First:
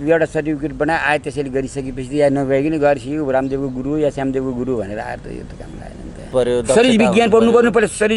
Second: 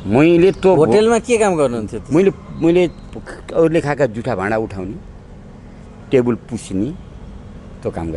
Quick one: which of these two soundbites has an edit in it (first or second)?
first